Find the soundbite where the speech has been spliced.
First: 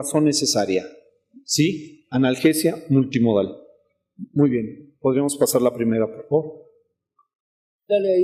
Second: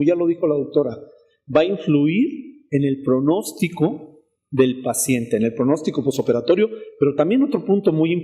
second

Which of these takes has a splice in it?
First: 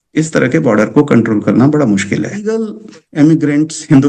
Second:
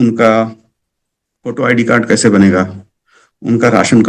first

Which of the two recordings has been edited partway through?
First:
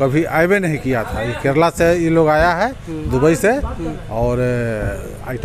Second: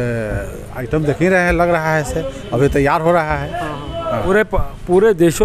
second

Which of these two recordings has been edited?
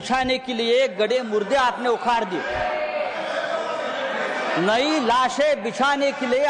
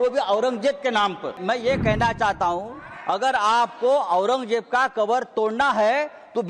second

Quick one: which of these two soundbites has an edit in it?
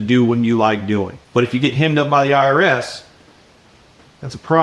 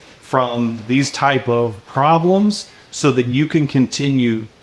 first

